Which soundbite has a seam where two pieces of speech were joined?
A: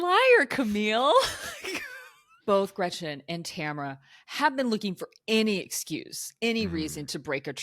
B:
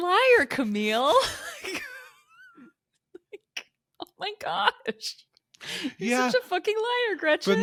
A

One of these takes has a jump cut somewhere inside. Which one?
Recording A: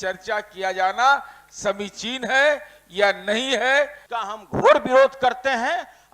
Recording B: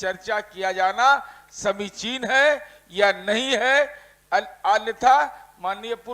A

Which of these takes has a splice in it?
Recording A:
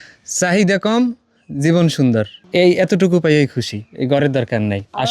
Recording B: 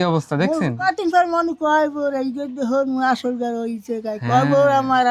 A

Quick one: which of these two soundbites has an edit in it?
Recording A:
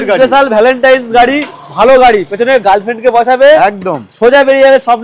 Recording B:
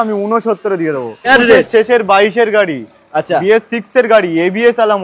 B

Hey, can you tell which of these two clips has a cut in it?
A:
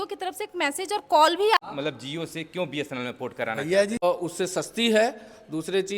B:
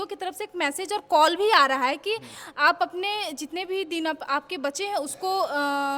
A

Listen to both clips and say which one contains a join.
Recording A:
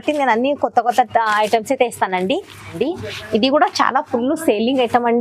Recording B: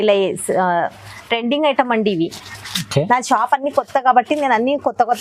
A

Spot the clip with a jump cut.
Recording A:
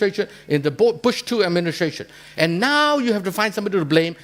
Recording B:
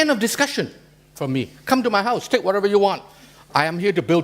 B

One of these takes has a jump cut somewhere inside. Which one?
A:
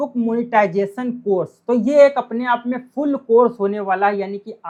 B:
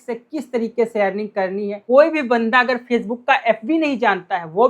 B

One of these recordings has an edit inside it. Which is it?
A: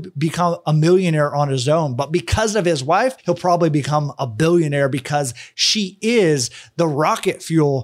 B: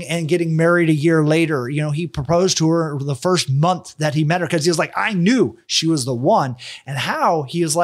A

